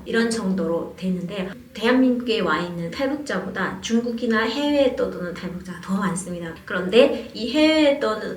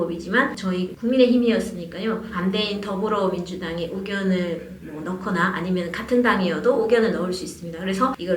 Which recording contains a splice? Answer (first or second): first